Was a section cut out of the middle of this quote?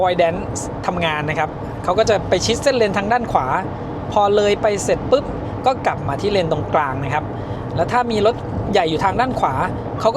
no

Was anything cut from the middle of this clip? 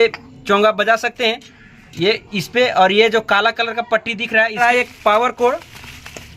yes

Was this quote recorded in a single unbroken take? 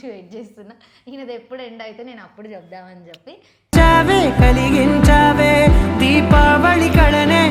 yes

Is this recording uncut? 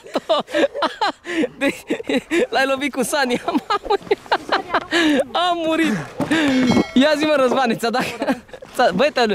yes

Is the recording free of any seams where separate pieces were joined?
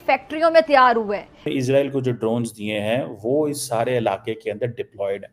no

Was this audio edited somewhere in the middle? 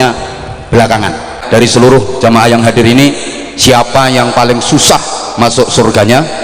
yes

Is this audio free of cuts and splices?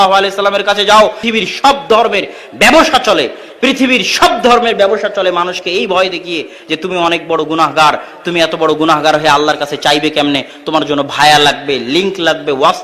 no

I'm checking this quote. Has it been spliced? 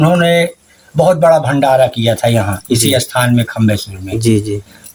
no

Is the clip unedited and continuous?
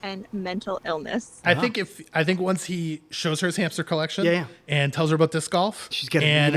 no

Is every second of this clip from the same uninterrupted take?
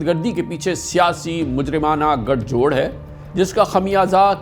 yes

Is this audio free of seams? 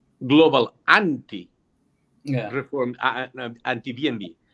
yes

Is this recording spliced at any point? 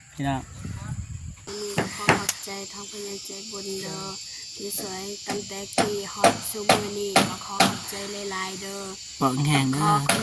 yes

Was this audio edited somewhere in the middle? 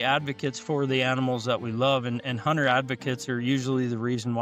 no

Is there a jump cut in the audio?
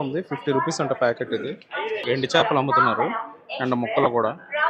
yes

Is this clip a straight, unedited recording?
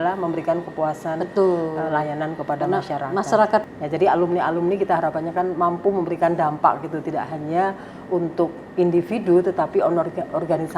no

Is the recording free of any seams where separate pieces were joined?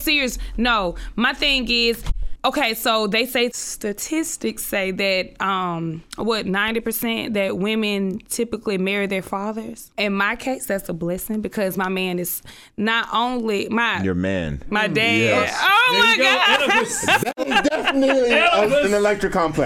yes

